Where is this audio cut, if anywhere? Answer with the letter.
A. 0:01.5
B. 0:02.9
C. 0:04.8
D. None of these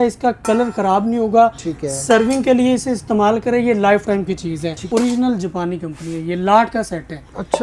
C